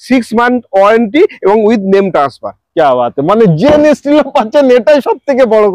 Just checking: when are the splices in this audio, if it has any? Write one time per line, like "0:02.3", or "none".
none